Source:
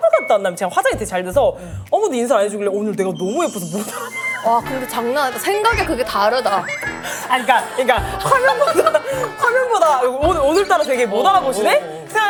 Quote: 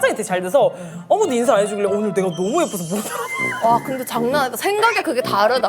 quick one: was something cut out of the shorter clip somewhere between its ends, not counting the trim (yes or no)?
no